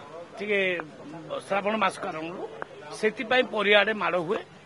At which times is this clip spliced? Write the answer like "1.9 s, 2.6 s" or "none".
none